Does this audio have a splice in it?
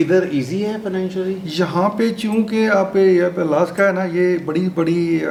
no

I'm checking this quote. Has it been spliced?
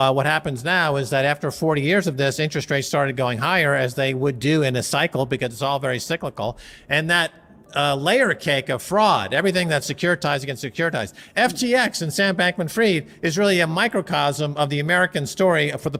no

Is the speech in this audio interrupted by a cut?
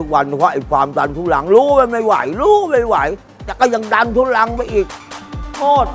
no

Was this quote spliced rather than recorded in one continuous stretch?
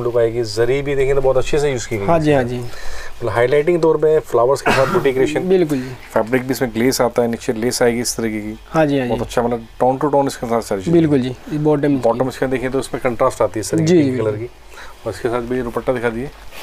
no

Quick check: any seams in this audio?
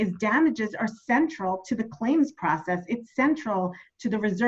no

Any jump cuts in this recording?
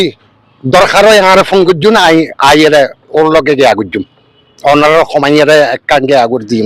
no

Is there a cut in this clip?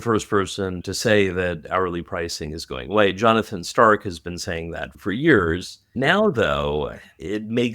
yes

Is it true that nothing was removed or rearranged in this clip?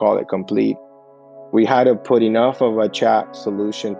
no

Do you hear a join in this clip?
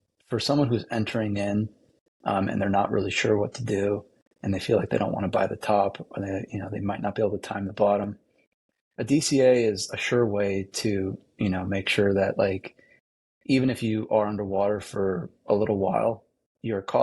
no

